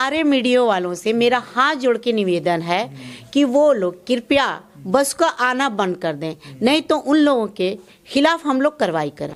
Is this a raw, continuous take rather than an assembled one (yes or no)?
yes